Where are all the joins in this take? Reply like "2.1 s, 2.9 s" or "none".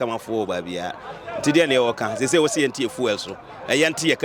none